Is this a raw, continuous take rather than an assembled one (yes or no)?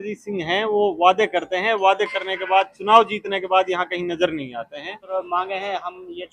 no